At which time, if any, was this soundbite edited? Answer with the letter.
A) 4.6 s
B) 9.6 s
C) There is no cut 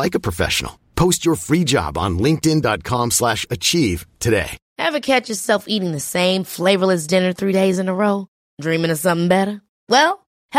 A